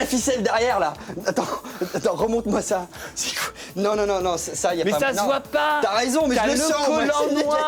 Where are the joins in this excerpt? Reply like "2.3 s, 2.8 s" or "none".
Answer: none